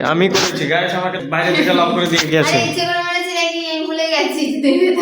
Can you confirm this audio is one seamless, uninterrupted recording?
no; 1 cut; at 1.2 s

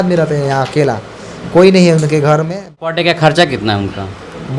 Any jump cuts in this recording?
yes; 1 cut; at 2.8 s

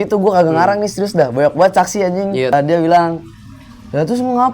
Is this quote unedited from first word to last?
no; 1 cut; at 2.5 s

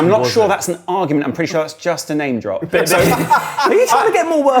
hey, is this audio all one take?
no; 1 cut; at 3.6 s

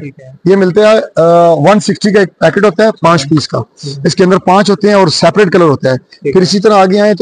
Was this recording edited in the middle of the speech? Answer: no; 0 cuts

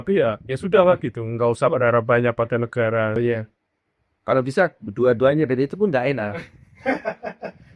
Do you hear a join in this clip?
yes; 1 cut; at 3.2 s

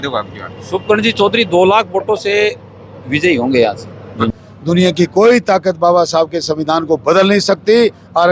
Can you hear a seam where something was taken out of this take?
yes; 1 cut; at 4.3 s

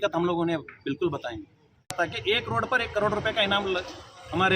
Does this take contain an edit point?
yes; 1 cut; at 1.9 s

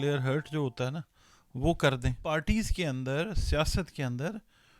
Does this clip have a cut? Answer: yes; 1 cut; at 2.2 s

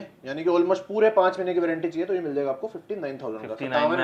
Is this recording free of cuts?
yes; 0 cuts

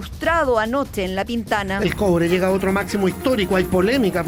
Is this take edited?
no; 0 cuts

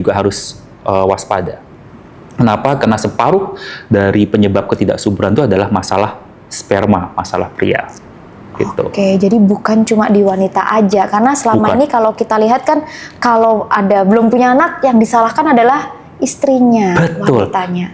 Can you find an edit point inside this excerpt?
no; 0 cuts

